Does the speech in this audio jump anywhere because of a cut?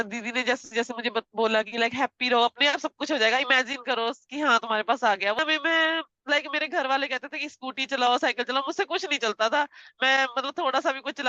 yes; 1 cut; at 5.4 s

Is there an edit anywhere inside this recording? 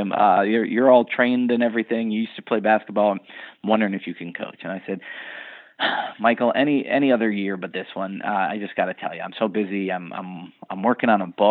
no; 0 cuts

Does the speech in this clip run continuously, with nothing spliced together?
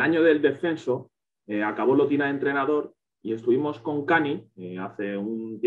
yes; 0 cuts

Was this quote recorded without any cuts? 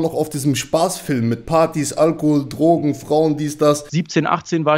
no; 1 cut; at 3.9 s

